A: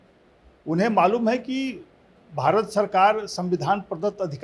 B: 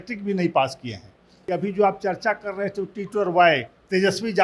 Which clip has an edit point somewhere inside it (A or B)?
B